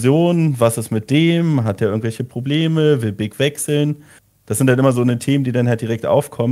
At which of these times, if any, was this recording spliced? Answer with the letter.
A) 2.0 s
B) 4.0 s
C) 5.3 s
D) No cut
D